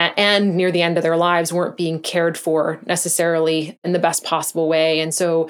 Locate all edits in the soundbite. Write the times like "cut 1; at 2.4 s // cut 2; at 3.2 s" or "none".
cut 1; at 3.8 s